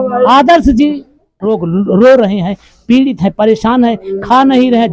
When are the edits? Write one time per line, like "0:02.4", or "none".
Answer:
0:01.3